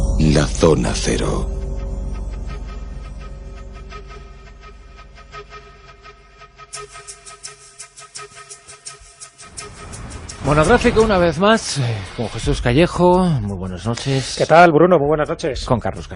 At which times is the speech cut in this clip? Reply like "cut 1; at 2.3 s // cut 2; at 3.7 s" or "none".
none